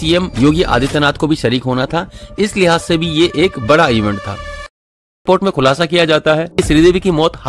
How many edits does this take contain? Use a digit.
2